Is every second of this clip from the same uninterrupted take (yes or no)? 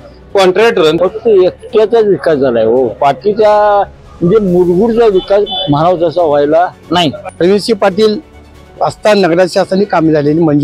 no